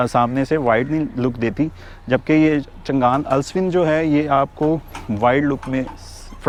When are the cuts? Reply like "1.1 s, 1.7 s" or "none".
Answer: none